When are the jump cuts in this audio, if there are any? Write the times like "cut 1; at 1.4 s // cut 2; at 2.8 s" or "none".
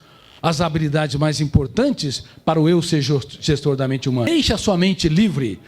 cut 1; at 4.3 s